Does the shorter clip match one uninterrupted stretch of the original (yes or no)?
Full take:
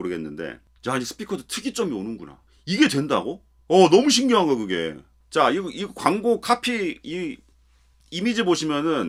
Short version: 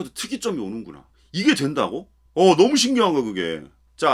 yes